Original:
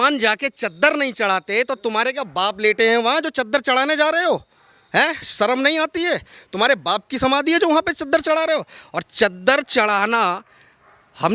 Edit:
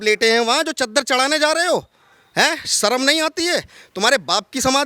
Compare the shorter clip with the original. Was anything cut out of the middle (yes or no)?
no